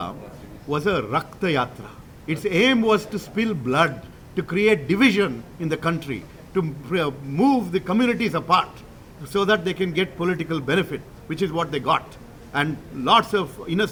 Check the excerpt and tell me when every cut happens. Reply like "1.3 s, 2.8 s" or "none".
none